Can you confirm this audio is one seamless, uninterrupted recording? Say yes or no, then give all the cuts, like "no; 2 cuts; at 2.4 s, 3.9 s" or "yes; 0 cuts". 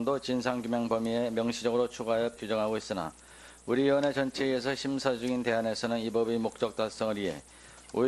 yes; 0 cuts